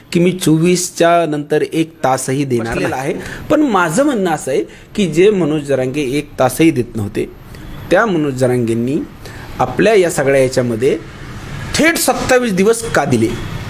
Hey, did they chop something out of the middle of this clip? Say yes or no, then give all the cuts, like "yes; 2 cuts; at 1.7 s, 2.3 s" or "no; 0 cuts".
yes; 1 cut; at 3.0 s